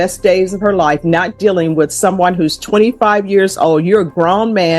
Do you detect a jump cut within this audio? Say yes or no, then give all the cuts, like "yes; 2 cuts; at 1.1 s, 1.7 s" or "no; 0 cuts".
no; 0 cuts